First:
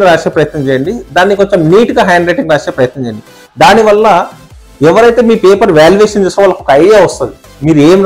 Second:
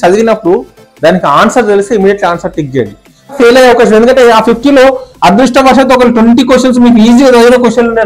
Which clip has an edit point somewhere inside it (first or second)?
second